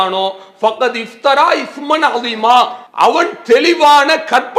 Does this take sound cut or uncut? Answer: cut